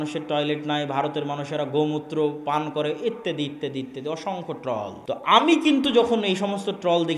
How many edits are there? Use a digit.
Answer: 1